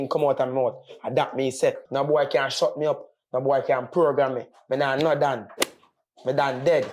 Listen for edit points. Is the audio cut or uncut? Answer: uncut